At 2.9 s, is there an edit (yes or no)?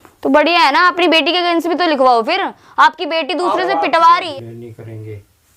no